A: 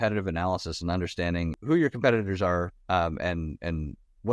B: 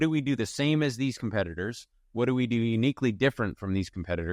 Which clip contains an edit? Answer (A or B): A